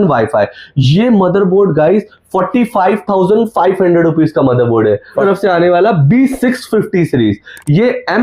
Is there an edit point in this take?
yes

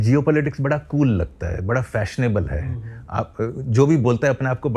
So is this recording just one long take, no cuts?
yes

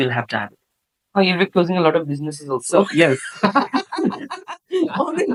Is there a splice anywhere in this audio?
no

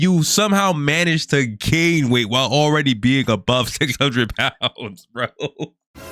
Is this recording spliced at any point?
no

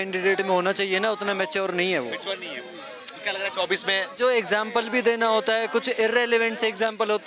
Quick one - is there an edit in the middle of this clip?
no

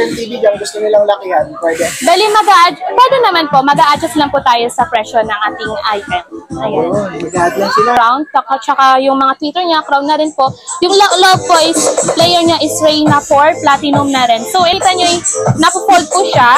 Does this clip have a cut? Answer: yes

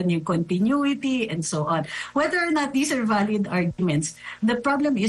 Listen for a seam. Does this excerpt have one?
no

